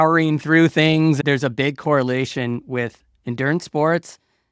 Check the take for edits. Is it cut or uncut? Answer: cut